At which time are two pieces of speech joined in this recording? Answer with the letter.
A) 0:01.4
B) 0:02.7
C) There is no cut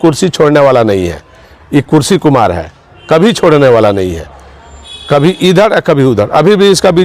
C